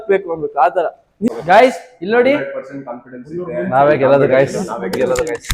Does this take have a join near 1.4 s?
yes; 1 cut; at 1.4 s

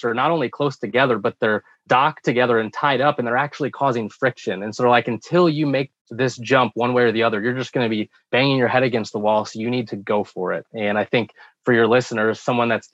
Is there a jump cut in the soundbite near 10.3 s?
no; 2 cuts; at 1.8 s, 8.1 s

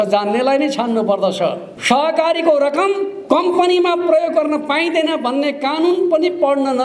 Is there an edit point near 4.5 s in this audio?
no; 2 cuts; at 1.7 s, 3.1 s

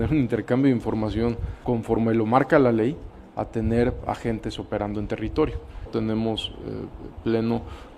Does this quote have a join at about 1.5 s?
yes; 2 cuts; at 1.5 s, 5.9 s

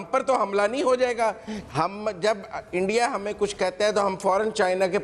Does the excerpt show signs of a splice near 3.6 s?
no; 1 cut; at 1.5 s

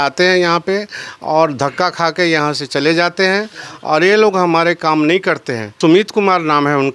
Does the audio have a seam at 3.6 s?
no; 1 cut; at 5.7 s

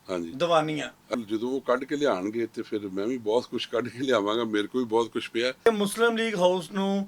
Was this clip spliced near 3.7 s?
no; 2 cuts; at 1.1 s, 5.7 s

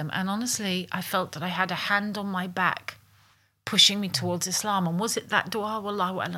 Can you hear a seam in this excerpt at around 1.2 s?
no; 0 cuts

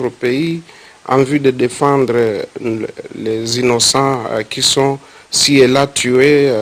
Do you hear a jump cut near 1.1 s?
no; 1 cut; at 2.8 s

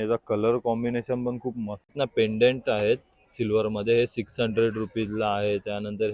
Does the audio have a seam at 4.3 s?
no; 1 cut; at 1.9 s

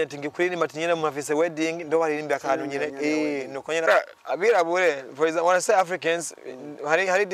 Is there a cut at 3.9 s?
yes; 1 cut; at 3.9 s

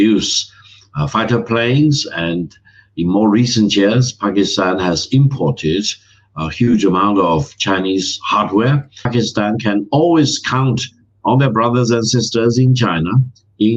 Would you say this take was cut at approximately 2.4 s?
no; 1 cut; at 9.1 s

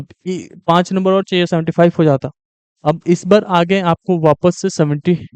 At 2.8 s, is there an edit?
no; 0 cuts

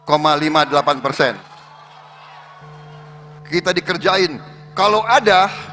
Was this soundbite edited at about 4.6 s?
no; 1 cut; at 2.7 s

